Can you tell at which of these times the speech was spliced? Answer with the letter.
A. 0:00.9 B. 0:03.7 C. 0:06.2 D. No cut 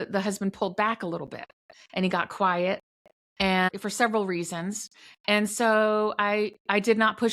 B